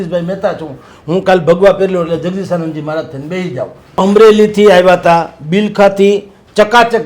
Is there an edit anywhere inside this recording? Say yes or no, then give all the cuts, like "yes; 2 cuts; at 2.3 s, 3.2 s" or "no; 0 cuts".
yes; 1 cut; at 3.8 s